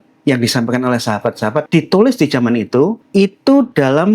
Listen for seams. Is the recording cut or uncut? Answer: cut